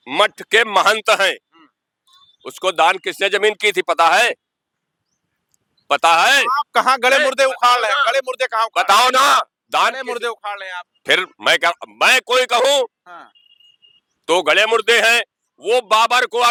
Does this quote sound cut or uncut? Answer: uncut